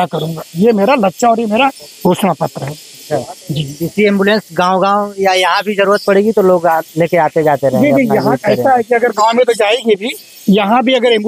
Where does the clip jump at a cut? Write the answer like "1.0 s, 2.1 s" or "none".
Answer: none